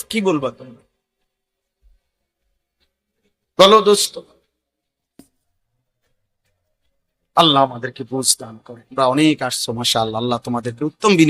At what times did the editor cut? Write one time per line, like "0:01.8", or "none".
0:08.8